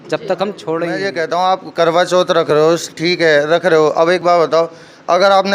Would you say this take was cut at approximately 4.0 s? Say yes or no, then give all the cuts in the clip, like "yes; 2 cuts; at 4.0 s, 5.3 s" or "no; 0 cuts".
no; 1 cut; at 1.1 s